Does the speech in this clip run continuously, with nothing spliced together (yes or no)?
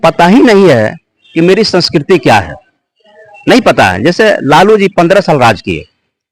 yes